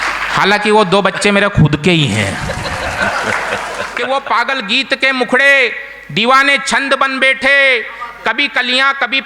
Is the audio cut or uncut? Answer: cut